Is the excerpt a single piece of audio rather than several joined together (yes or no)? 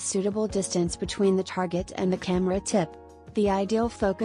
yes